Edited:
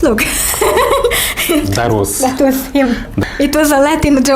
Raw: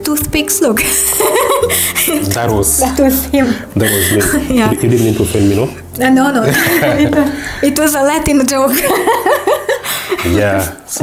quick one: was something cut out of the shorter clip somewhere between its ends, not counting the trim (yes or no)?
yes